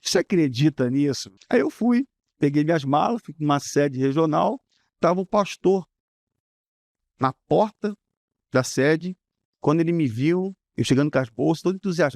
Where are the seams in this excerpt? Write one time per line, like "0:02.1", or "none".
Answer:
0:01.3

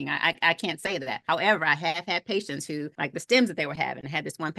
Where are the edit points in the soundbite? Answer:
0:01.2
0:02.9

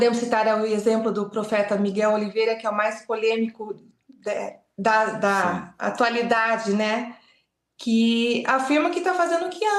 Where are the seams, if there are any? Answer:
none

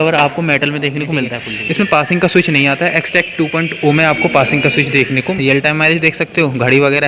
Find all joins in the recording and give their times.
0:01.4
0:05.2

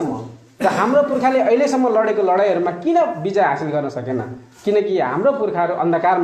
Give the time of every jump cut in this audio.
none

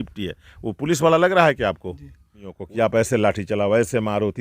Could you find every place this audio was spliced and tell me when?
0:02.6

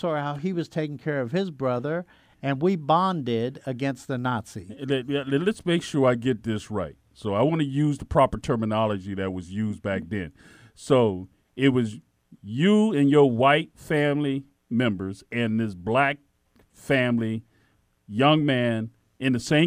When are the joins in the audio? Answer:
none

